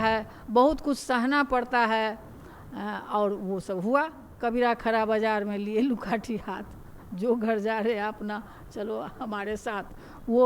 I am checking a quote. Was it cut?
yes; 1 cut; at 4.2 s

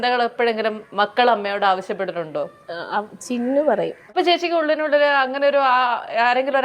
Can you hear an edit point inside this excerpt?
yes; 1 cut; at 4.1 s

